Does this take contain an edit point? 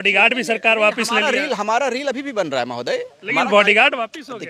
no; 0 cuts

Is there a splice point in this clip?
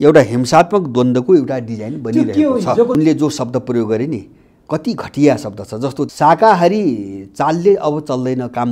yes; 2 cuts; at 2.9 s, 6.1 s

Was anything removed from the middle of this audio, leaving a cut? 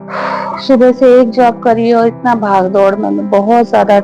no; 0 cuts

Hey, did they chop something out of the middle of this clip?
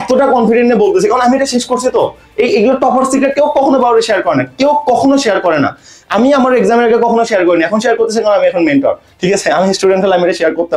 no; 0 cuts

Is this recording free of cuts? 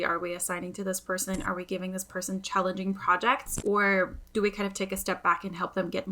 no; 1 cut; at 3.5 s

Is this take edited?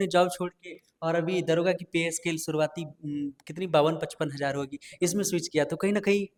no; 0 cuts

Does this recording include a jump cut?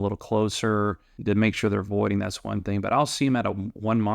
yes; 1 cut; at 1.1 s

